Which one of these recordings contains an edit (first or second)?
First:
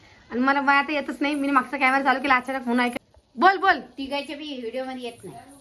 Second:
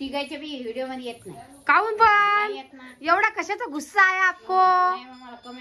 first